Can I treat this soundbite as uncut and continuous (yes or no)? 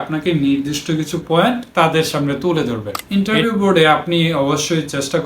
no